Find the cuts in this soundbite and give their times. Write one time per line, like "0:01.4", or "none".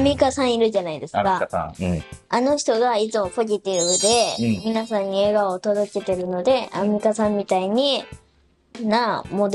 none